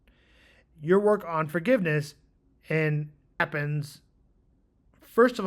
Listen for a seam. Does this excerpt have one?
yes; 1 cut; at 3.4 s

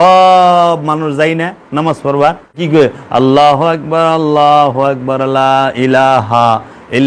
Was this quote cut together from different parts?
yes; 1 cut; at 2.6 s

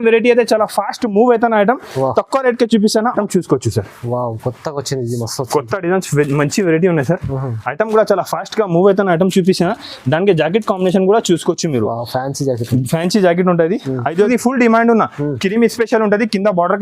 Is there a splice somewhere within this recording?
yes; 2 cuts; at 3.2 s, 14.3 s

